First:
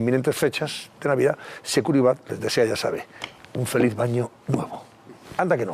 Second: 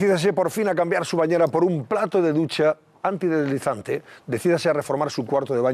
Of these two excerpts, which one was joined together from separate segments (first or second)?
first